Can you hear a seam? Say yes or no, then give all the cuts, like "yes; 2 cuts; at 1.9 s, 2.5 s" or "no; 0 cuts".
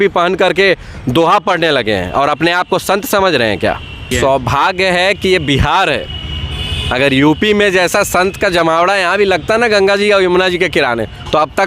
yes; 1 cut; at 4.0 s